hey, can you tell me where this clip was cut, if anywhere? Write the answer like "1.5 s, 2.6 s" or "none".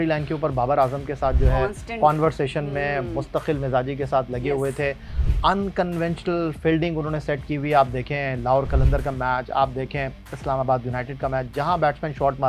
none